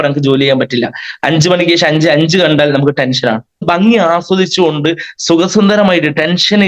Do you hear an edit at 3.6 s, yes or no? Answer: yes